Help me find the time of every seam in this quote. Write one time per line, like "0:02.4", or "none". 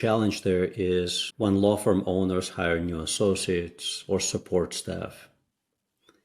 0:01.2